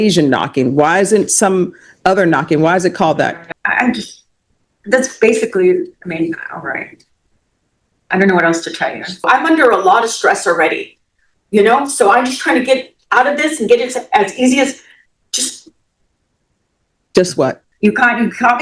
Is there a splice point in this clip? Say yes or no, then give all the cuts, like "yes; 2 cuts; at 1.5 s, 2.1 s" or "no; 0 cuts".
yes; 3 cuts; at 3.5 s, 9.3 s, 17.6 s